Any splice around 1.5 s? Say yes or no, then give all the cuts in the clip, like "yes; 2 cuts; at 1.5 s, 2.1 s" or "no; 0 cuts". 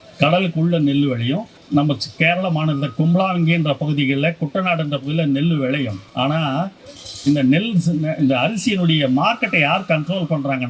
yes; 2 cuts; at 1.5 s, 6.0 s